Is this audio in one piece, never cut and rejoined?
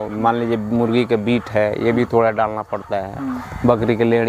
yes; 0 cuts

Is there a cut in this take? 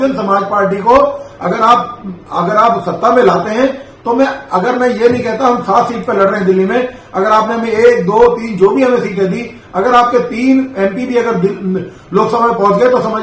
no; 0 cuts

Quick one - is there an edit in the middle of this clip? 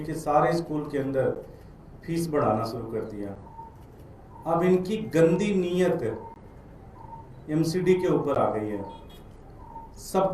no; 0 cuts

